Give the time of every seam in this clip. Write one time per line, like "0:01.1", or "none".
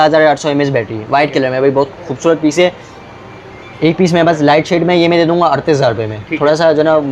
none